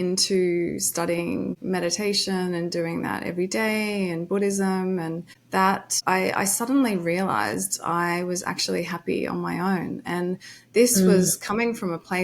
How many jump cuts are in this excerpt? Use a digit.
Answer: 2